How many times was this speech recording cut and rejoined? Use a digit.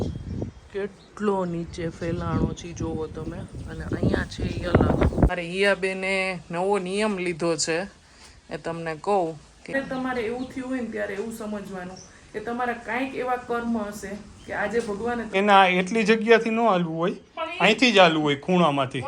3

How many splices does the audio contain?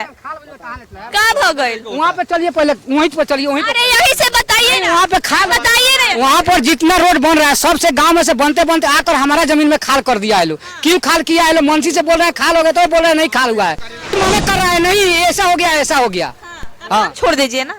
1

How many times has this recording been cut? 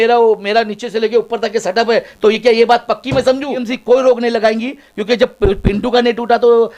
1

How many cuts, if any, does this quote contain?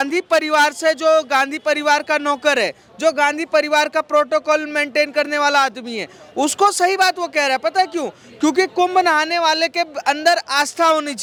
0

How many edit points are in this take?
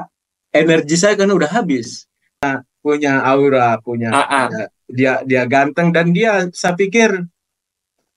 1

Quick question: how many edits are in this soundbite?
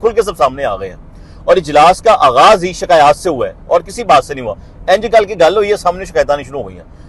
0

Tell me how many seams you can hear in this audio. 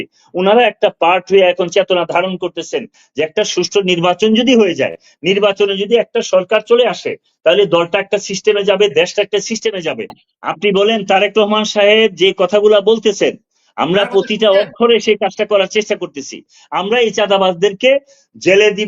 3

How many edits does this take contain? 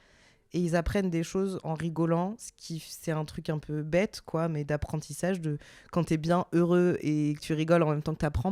0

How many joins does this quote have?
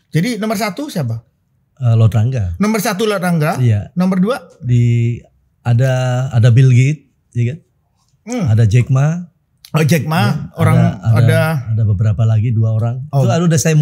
0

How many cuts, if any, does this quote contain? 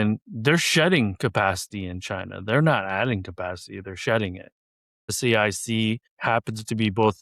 1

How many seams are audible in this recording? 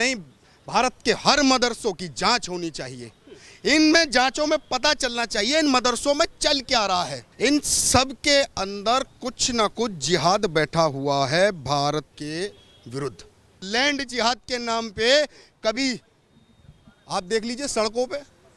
3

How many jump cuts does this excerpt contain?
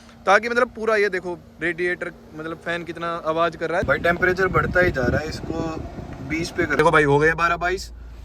2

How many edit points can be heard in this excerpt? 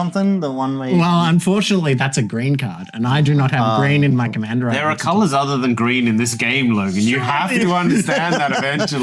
0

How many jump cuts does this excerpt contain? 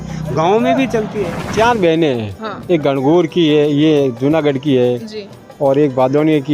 1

